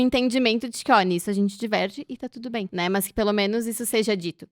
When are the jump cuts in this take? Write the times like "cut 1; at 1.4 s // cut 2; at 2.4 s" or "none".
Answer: cut 1; at 2.7 s